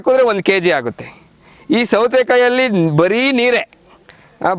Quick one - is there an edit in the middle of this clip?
no; 0 cuts

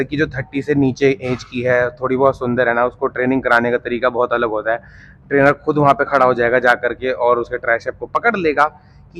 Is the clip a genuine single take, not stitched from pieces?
yes; 0 cuts

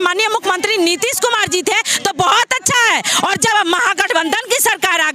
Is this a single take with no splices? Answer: yes; 0 cuts

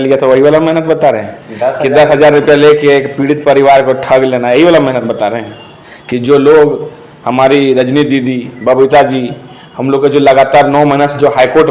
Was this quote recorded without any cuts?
yes; 0 cuts

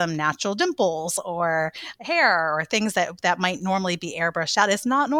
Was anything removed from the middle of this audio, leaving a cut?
no; 0 cuts

